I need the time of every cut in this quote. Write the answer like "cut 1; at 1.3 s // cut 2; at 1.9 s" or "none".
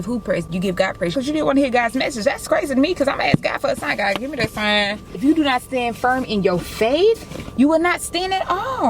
cut 1; at 1.1 s // cut 2; at 5.2 s

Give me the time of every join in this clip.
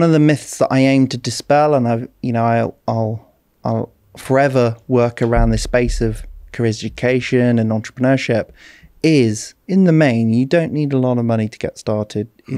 cut 1; at 9.5 s

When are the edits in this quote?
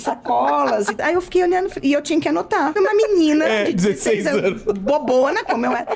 cut 1; at 1.0 s // cut 2; at 2.7 s

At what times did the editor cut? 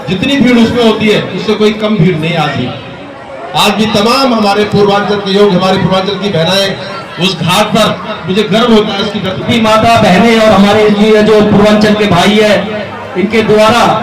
cut 1; at 9.4 s

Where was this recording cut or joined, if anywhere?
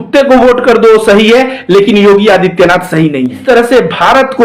cut 1; at 3.4 s

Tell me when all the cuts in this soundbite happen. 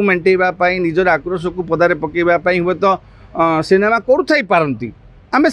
none

